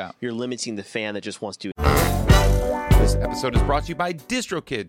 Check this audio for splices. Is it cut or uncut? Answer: cut